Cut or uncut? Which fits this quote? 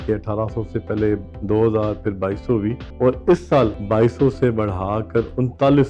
cut